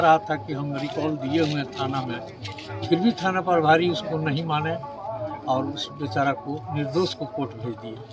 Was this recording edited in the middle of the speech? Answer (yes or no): no